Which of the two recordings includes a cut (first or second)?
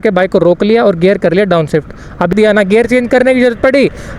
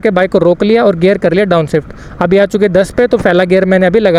first